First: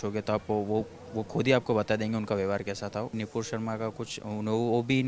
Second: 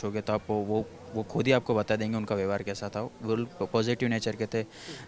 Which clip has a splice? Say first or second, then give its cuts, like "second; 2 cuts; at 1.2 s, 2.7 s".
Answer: first; 1 cut; at 3.2 s